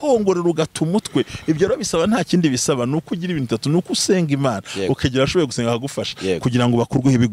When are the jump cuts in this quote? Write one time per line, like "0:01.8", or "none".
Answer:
none